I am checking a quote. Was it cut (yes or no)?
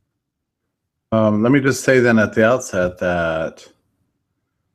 no